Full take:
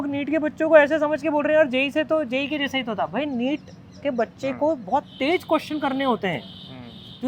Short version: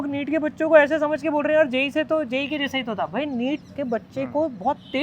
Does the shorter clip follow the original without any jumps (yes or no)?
no